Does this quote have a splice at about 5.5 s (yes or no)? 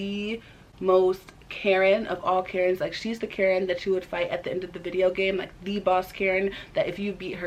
no